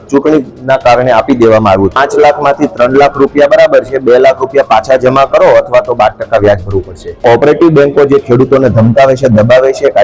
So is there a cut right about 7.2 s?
yes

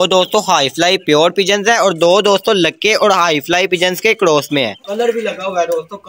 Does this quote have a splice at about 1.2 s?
no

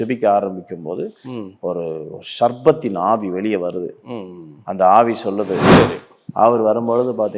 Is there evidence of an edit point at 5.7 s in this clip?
yes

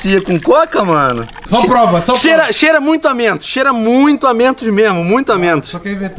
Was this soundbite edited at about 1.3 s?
yes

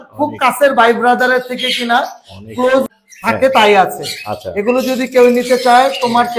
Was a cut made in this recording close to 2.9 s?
yes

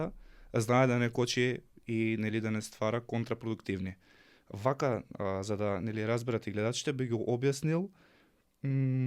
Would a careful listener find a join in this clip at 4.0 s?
no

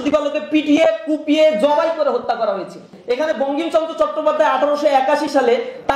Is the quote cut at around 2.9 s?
yes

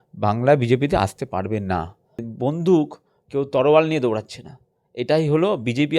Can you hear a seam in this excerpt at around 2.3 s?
yes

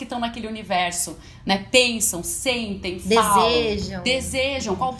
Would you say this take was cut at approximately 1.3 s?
no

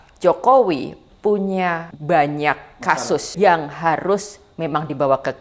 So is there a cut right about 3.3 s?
yes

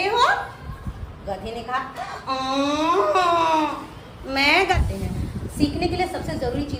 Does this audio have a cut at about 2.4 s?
no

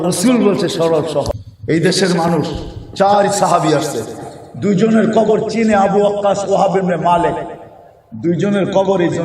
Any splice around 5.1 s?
no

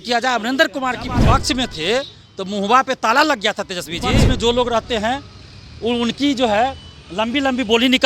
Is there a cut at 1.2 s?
yes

